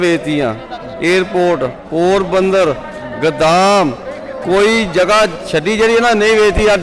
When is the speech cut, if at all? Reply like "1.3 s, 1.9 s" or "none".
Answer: none